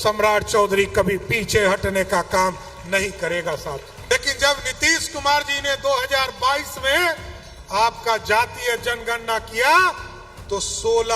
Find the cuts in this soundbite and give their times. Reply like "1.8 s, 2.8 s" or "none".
3.9 s